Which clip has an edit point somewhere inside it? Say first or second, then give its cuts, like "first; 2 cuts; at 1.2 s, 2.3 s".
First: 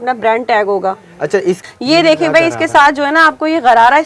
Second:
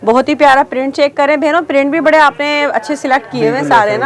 first; 1 cut; at 1.6 s